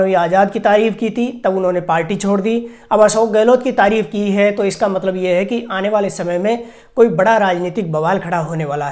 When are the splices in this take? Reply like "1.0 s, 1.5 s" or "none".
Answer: none